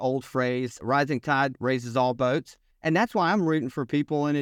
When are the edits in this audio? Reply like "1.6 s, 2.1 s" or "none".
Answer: 0.8 s, 2.7 s